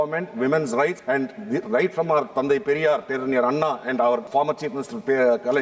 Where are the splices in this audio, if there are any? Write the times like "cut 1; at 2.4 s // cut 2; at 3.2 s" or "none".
cut 1; at 1.0 s // cut 2; at 3.1 s // cut 3; at 4.3 s

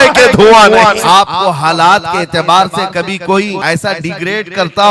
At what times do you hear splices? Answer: cut 1; at 1.0 s // cut 2; at 3.6 s

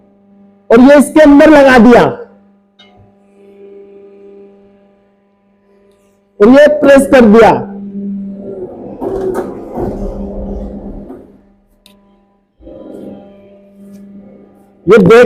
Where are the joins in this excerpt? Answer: none

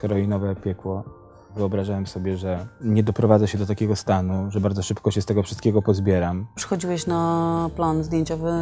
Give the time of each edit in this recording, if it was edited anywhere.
cut 1; at 1.5 s // cut 2; at 2.7 s // cut 3; at 6.6 s

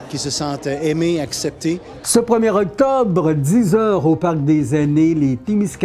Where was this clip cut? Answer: cut 1; at 1.9 s

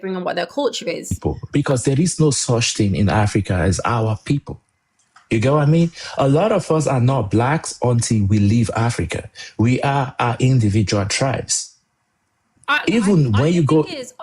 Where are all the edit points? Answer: cut 1; at 1.2 s

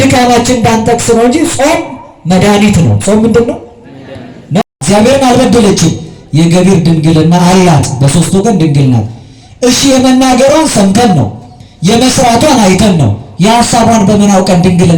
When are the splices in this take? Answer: cut 1; at 4.7 s

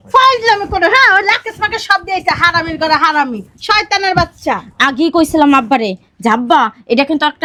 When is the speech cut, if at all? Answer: none

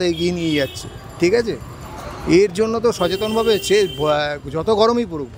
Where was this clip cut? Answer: none

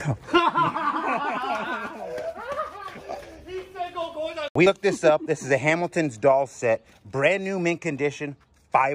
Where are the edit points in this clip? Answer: cut 1; at 4.6 s

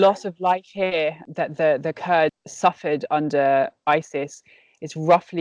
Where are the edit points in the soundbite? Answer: cut 1; at 1.2 s // cut 2; at 2.4 s

